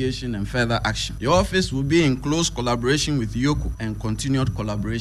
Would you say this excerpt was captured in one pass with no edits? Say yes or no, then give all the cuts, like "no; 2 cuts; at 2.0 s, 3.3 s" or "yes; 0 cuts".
no; 2 cuts; at 1.1 s, 3.7 s